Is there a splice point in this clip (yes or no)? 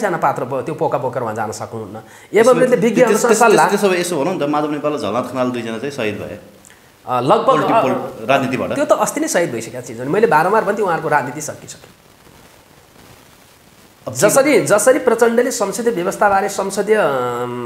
no